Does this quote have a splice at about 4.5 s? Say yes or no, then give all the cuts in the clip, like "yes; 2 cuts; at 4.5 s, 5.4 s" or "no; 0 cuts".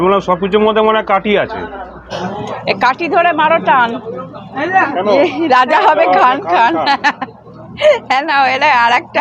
no; 1 cut; at 2.1 s